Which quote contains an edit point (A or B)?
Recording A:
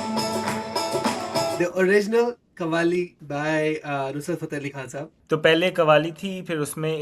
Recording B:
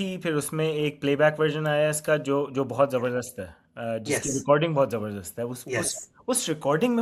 A